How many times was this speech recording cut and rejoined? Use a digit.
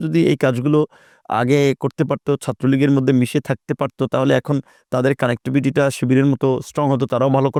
0